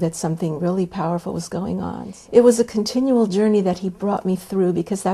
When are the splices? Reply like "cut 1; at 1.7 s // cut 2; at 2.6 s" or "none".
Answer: cut 1; at 2.1 s